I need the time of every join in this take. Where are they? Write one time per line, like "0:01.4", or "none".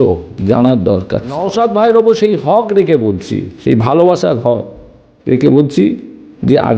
0:01.5